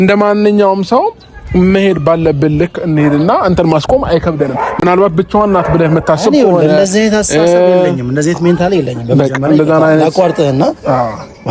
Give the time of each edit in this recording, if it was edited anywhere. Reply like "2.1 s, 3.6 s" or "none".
none